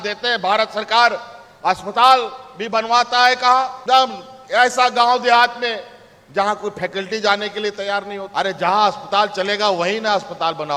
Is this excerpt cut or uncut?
uncut